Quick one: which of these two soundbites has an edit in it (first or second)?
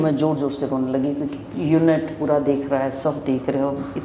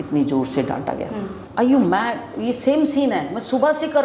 second